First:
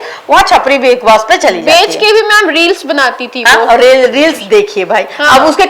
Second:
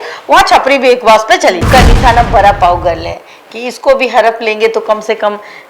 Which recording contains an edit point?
second; 1 cut; at 1.6 s

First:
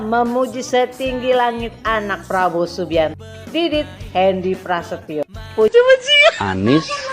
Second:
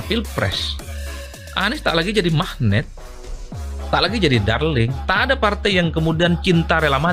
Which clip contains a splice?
first; 1 cut; at 5.7 s

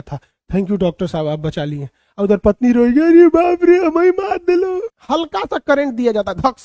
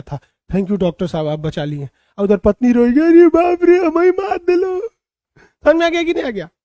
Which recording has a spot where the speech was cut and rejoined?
first; 1 cut; at 4.9 s

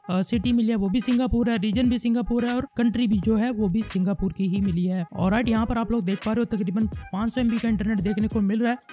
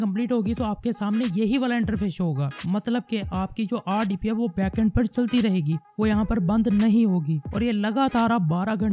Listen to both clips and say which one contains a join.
first; 1 cut; at 5.1 s

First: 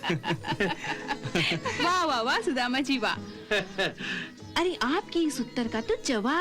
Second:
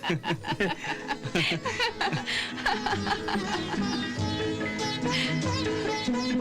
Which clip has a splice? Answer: first; 1 cut; at 1.8 s

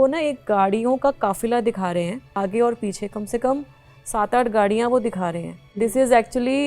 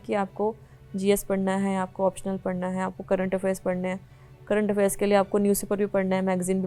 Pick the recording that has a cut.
first; 2 cuts; at 2.4 s, 5.6 s

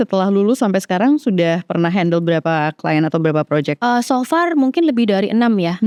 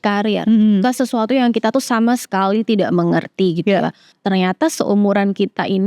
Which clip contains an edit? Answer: second; 1 cut; at 4.2 s

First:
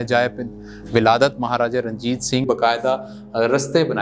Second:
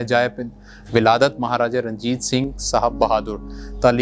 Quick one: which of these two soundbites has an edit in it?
first; 1 cut; at 2.5 s

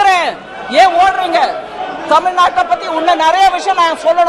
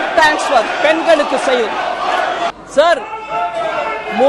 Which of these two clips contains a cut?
second; 1 cut; at 2.5 s

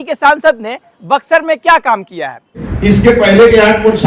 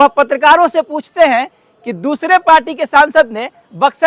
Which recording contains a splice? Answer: first; 1 cut; at 2.6 s

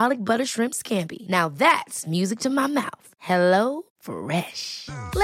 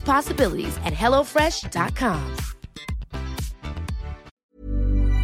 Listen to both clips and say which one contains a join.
second; 1 cut; at 4.3 s

